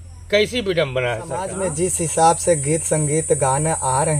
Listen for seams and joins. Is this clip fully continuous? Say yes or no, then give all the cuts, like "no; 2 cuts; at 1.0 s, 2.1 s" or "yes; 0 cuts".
no; 1 cut; at 1.6 s